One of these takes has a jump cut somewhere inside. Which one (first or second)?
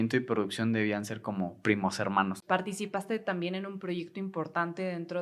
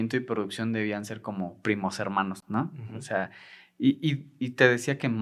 first